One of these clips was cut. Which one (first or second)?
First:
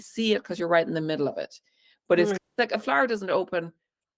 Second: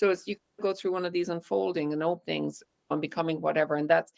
first